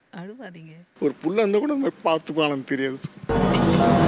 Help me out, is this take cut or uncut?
cut